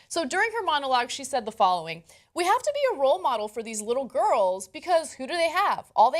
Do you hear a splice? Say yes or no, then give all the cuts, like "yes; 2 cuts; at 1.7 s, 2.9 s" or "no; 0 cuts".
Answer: yes; 1 cut; at 3.2 s